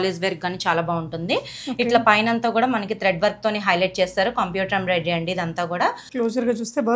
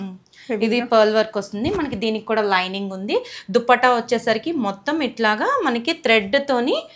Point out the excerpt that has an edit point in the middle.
first; 1 cut; at 6.1 s

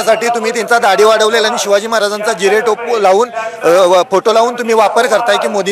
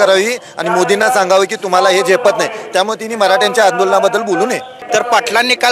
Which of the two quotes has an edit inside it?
second; 1 cut; at 4.7 s

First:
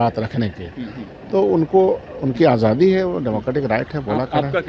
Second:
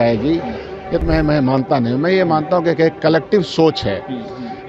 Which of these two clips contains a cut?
second; 1 cut; at 1.0 s

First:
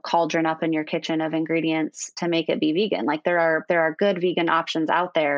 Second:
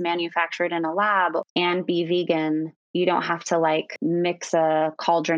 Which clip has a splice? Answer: second; 3 cuts; at 1.5 s, 2.8 s, 3.9 s

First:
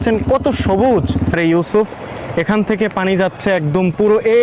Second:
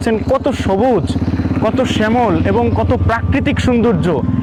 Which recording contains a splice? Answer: first; 1 cut; at 1.3 s

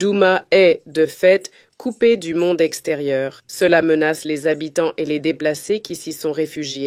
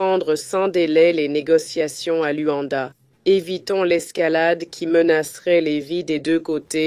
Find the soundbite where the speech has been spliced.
first; 1 cut; at 3.4 s

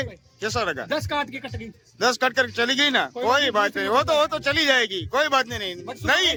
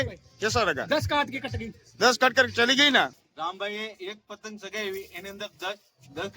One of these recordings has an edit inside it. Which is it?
second; 1 cut; at 3.1 s

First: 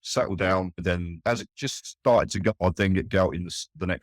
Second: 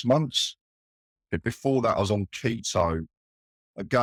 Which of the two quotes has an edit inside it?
first; 2 cuts; at 1.2 s, 2.6 s

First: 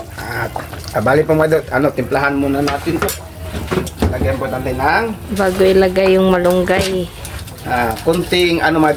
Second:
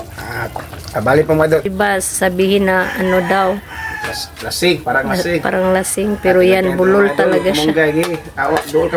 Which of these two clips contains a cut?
second; 1 cut; at 1.7 s

